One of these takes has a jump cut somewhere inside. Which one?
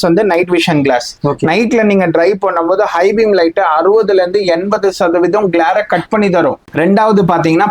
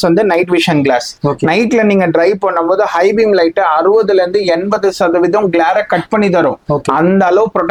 first; 1 cut; at 6.7 s

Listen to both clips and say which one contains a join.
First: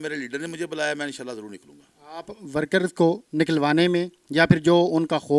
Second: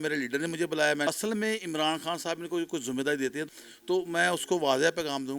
second; 2 cuts; at 1.1 s, 3.4 s

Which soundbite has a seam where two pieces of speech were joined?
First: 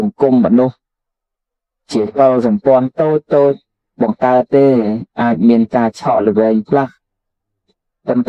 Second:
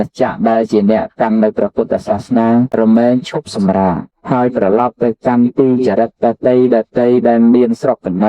second; 2 cuts; at 3.0 s, 4.5 s

